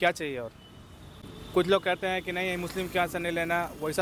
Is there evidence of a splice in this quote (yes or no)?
no